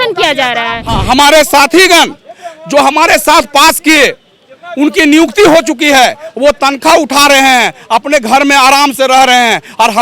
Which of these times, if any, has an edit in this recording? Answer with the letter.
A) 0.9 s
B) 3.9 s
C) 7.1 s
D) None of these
A